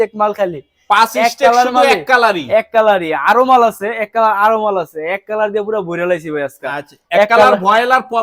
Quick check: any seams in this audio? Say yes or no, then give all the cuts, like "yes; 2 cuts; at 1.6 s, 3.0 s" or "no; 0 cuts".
no; 0 cuts